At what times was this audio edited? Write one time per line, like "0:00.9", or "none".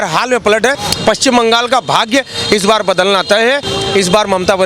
0:00.9
0:03.7